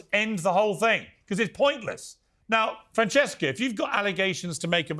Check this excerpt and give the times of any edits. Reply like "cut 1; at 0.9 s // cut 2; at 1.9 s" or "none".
none